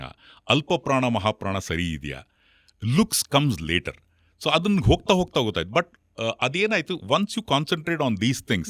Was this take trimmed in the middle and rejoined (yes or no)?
no